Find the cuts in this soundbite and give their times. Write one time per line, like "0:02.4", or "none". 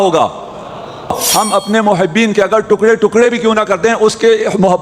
0:01.1